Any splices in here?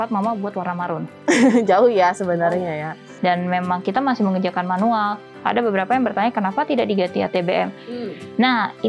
yes; 1 cut; at 3.0 s

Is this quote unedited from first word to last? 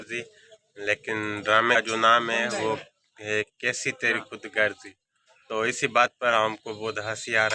no; 1 cut; at 1.8 s

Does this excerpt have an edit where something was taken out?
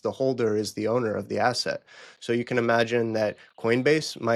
no; 0 cuts

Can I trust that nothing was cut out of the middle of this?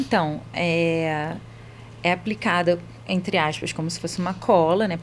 yes; 0 cuts

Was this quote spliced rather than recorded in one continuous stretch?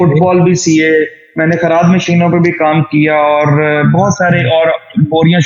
no; 0 cuts

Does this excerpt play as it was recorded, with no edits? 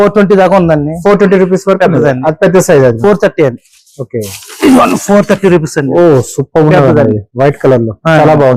yes; 0 cuts

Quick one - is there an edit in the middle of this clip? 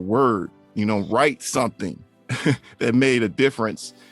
no; 0 cuts

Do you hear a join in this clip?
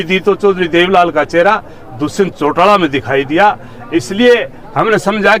no; 0 cuts

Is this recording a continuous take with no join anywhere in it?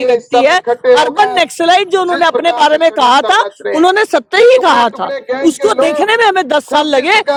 yes; 0 cuts

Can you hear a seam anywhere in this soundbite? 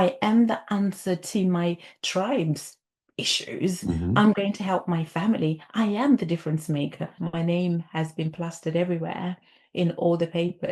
yes; 1 cut; at 7.1 s

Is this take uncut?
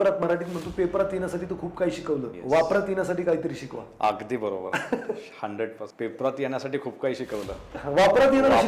no; 2 cuts; at 2.3 s, 5.9 s

